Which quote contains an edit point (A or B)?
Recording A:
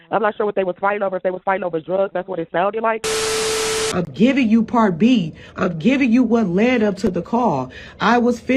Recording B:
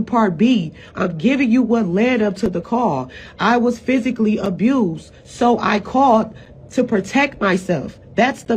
A